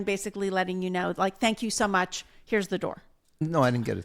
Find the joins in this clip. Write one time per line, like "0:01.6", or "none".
none